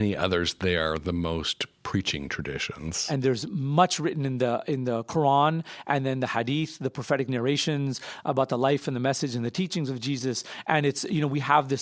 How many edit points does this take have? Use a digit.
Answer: 1